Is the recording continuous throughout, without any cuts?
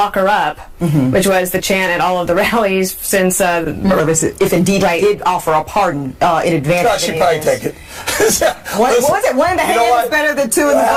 yes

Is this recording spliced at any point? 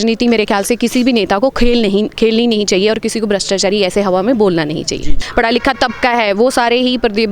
yes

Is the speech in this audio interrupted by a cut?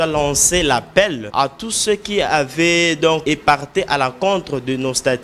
yes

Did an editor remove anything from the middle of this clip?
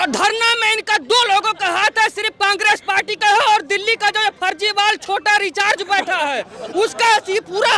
no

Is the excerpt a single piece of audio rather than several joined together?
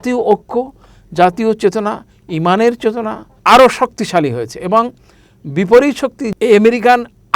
no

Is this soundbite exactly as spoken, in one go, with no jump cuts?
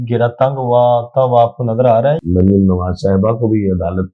no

